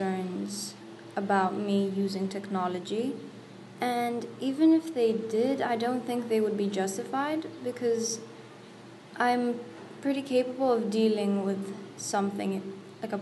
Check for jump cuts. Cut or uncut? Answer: uncut